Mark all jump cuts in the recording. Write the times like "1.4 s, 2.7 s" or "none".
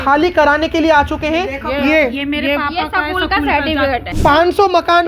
4.1 s